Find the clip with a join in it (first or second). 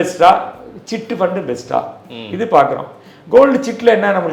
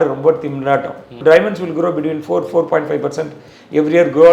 second